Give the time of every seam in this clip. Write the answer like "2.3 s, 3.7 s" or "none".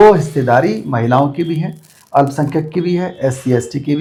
none

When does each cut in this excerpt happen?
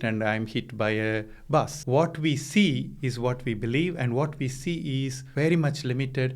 1.8 s, 5.2 s

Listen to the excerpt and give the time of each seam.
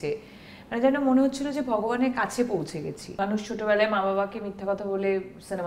3.0 s

